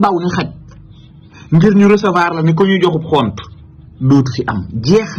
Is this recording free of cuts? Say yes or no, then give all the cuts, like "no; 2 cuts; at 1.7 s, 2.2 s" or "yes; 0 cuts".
yes; 0 cuts